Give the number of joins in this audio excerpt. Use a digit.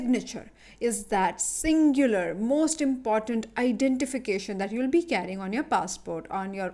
0